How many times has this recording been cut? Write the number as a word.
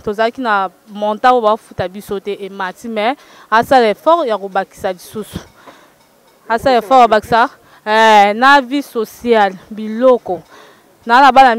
zero